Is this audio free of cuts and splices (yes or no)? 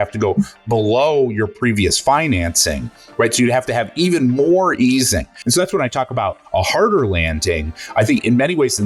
no